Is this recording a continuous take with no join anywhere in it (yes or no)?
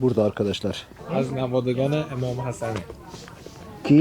no